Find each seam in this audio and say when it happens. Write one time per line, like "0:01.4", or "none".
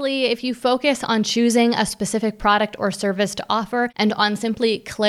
0:03.9